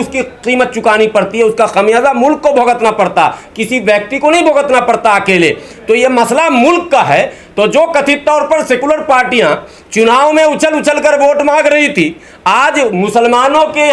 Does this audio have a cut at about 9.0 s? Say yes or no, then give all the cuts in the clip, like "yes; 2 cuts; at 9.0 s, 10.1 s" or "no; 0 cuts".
no; 0 cuts